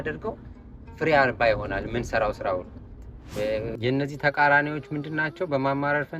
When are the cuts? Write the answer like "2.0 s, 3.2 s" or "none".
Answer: 3.7 s